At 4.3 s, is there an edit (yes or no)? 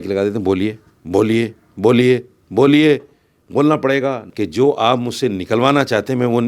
yes